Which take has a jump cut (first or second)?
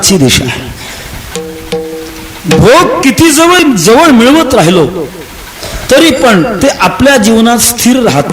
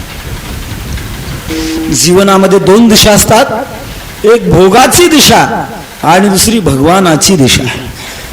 second